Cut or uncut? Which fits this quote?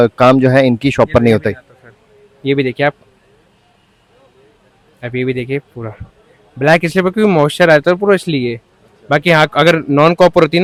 uncut